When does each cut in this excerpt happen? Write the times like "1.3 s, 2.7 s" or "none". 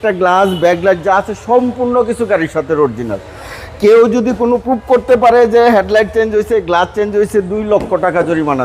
4.6 s